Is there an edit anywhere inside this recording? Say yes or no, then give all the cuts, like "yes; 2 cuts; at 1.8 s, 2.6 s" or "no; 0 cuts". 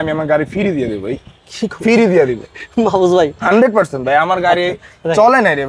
no; 0 cuts